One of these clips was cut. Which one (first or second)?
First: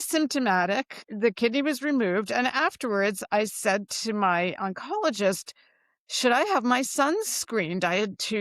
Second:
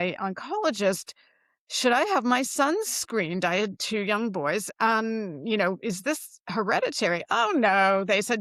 first